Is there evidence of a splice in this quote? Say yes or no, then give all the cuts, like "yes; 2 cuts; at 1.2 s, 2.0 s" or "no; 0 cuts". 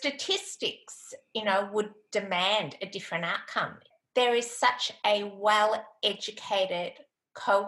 yes; 1 cut; at 3.9 s